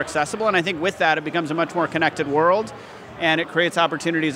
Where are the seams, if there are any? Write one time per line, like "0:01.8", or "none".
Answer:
none